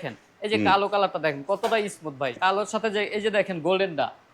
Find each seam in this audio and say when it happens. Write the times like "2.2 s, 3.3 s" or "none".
2.3 s